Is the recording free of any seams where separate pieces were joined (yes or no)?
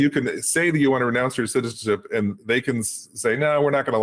yes